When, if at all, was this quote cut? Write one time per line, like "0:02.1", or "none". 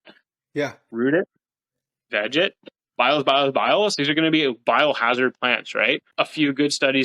0:06.1